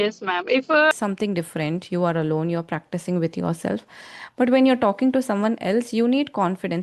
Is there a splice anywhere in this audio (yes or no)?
yes